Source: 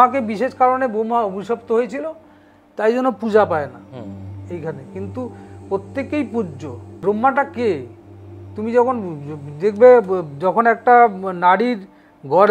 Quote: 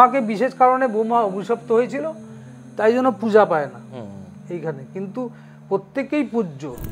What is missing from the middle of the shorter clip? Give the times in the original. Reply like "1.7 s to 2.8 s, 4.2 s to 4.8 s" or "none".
none